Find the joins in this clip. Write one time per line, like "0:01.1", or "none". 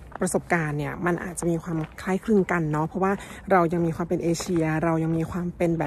none